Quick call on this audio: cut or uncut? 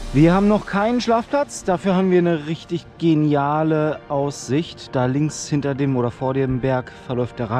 uncut